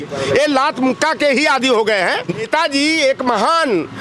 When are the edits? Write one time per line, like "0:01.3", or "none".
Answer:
0:02.5